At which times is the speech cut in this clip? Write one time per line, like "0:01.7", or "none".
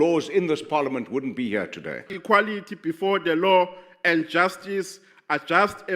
0:02.1